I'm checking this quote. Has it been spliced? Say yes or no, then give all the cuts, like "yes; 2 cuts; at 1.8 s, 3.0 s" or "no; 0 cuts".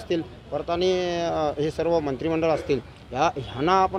no; 0 cuts